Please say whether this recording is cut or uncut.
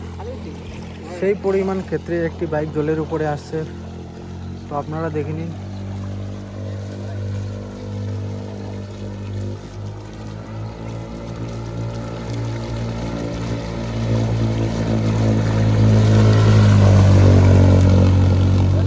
uncut